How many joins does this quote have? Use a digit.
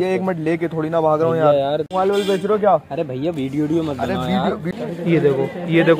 2